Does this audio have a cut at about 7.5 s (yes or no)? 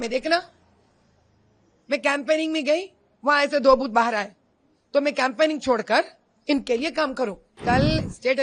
yes